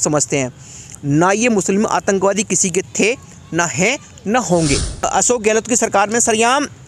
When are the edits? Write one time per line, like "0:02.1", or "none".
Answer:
0:05.3